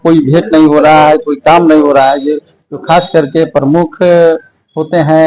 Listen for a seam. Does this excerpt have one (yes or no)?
no